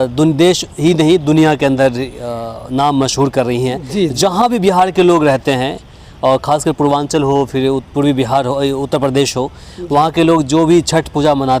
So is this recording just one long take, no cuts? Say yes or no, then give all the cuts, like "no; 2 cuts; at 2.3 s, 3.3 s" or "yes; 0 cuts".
yes; 0 cuts